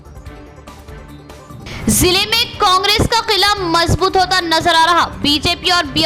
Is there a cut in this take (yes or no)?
yes